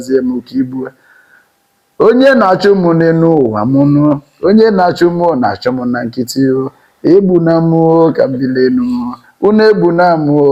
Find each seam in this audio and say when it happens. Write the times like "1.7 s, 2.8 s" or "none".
none